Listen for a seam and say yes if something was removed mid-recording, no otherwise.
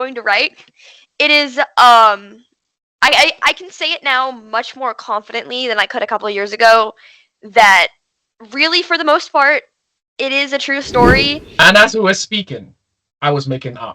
yes